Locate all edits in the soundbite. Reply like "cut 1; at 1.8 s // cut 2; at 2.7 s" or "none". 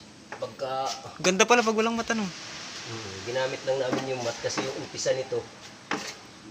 none